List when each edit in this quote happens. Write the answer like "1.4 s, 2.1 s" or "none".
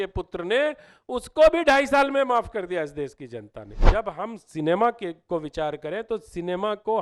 3.8 s